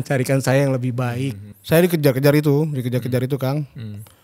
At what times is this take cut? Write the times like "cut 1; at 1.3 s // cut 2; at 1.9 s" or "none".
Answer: cut 1; at 1.5 s